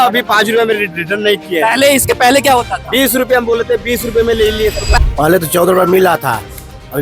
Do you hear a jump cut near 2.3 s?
no; 1 cut; at 5.0 s

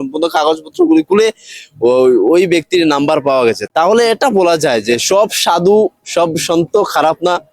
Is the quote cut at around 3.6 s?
yes; 1 cut; at 3.6 s

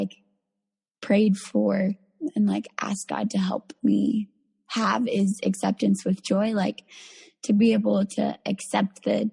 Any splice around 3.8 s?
no; 1 cut; at 2.1 s

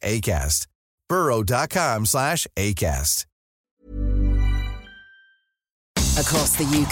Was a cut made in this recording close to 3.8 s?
no; 1 cut; at 5.8 s

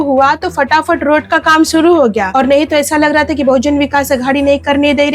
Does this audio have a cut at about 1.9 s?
no; 0 cuts

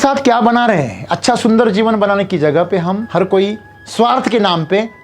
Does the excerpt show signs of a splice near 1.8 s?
no; 1 cut; at 3.0 s

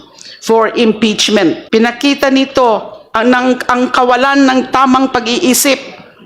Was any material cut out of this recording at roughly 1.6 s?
yes; 1 cut; at 1.6 s

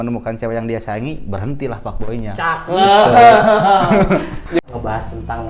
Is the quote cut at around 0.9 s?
no; 1 cut; at 4.6 s

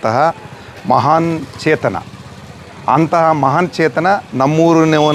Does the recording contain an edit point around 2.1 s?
no; 0 cuts

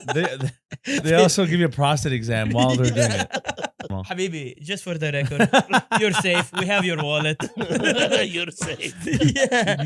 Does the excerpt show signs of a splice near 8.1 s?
no; 2 cuts; at 1.0 s, 4.0 s

